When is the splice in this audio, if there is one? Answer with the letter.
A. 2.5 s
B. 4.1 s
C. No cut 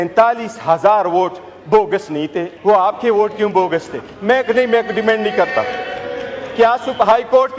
A